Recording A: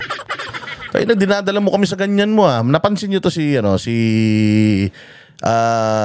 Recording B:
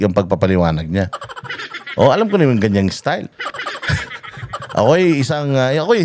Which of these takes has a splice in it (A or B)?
B